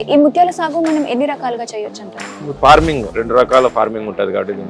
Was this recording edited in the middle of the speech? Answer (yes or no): yes